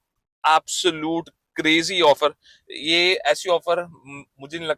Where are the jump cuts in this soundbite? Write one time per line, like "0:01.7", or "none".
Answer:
none